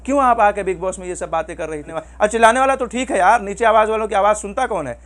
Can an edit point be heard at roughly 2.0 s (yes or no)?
yes